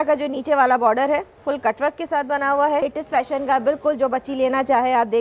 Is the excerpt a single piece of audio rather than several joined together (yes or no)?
no